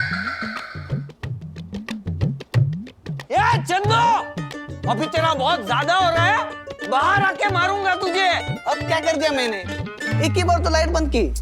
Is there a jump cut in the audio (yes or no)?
no